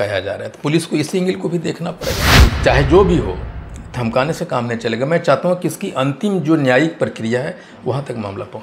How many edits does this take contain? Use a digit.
1